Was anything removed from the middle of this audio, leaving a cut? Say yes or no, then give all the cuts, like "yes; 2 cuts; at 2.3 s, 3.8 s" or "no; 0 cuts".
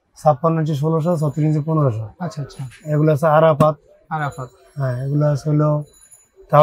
no; 0 cuts